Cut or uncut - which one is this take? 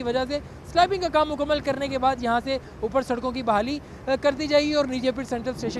uncut